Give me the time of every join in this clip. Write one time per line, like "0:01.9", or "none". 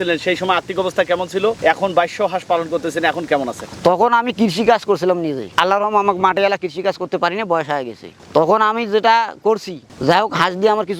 none